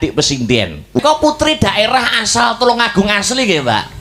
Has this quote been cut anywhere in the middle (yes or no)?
yes